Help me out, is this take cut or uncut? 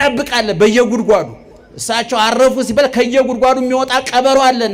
uncut